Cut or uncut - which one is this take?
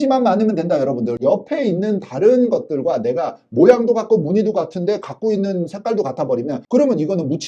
uncut